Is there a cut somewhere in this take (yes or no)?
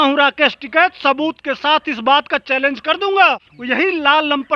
yes